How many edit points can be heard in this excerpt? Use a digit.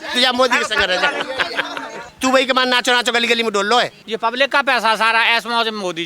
2